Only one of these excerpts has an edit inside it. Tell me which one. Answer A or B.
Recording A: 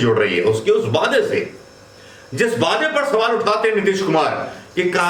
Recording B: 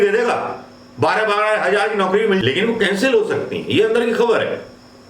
B